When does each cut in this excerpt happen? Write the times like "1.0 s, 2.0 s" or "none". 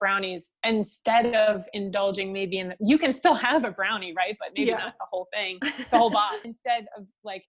6.5 s